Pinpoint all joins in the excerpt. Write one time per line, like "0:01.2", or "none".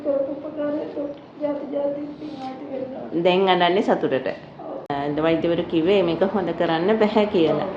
0:04.9